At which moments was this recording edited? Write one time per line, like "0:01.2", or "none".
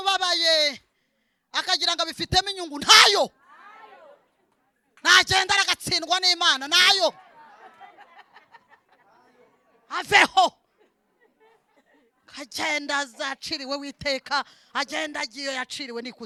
none